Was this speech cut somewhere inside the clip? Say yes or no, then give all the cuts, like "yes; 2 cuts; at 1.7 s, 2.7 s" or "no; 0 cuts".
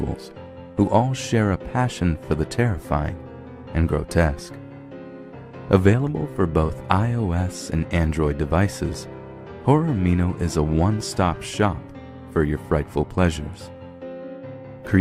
no; 0 cuts